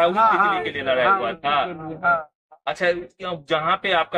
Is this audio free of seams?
yes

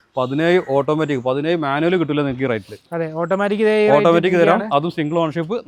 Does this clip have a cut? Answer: no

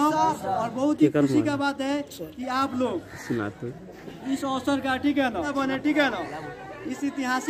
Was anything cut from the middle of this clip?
yes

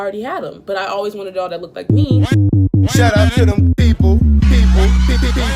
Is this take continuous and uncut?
no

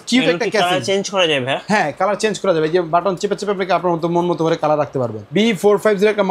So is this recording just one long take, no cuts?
no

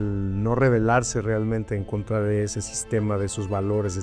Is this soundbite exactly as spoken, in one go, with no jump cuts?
yes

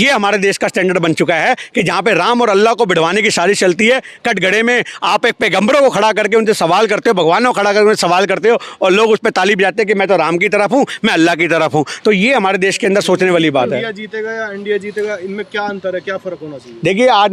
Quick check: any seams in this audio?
no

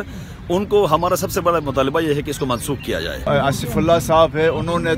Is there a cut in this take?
yes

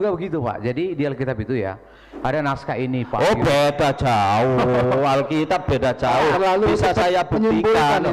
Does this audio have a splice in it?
no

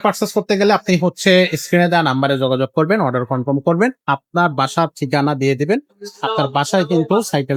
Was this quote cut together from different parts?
no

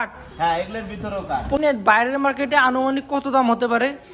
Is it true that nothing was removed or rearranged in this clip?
no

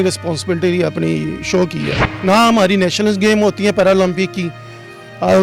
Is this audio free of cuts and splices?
no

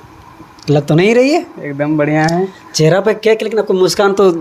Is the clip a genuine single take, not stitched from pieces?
yes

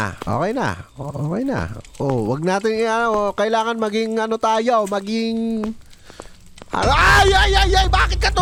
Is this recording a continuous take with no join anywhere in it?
yes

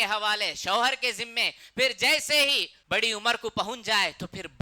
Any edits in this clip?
yes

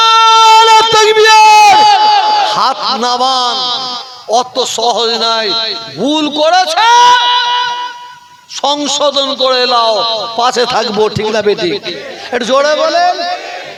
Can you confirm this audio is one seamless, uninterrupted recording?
yes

